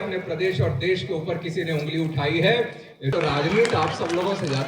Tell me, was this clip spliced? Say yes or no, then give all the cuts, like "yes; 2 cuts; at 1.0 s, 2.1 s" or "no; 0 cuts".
yes; 1 cut; at 3.0 s